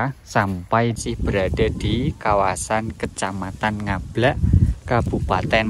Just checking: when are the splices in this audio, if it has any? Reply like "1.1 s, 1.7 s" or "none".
1.0 s